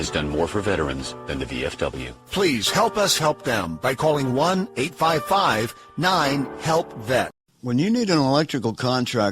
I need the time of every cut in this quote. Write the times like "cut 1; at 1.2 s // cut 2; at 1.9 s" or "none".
cut 1; at 7.5 s